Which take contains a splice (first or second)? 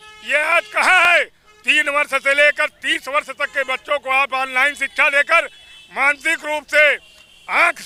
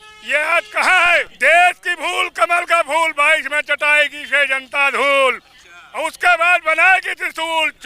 second